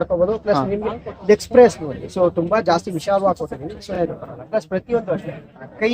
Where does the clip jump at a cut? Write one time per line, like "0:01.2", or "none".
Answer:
0:03.9